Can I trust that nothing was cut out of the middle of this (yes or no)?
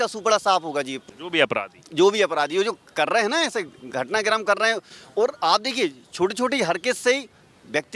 yes